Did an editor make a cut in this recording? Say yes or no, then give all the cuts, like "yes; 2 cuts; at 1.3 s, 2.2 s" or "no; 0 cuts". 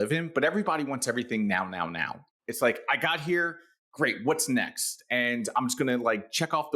yes; 1 cut; at 2.4 s